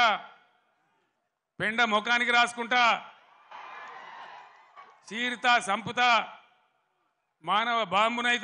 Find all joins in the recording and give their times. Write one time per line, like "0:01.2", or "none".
none